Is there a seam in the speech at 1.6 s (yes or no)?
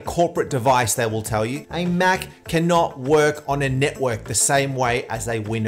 yes